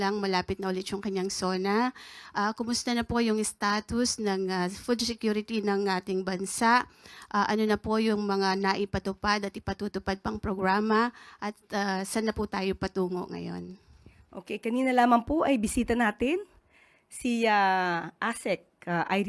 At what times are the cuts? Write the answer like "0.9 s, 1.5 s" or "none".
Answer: none

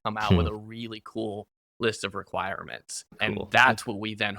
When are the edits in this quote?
3.2 s

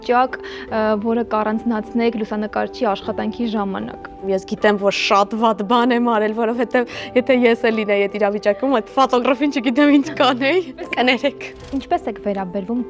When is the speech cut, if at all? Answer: 4.2 s, 10.8 s, 11.7 s

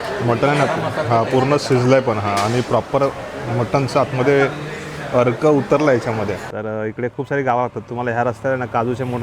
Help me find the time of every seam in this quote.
6.5 s

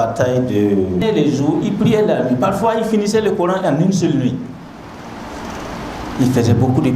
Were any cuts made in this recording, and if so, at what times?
1.0 s

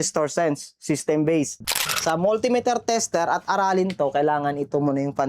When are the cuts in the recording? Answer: 1.6 s

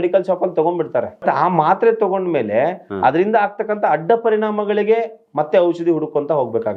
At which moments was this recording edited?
1.2 s

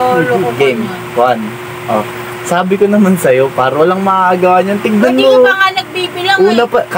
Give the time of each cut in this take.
none

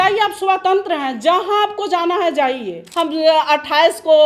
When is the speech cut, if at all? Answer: 2.8 s

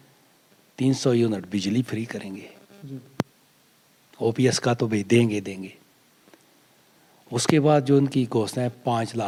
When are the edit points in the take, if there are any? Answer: none

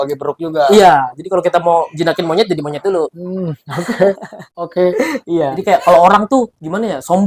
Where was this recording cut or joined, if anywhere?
5.6 s

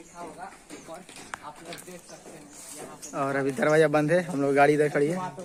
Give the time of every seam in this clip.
none

